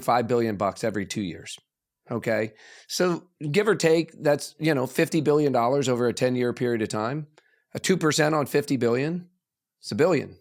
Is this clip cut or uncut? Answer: uncut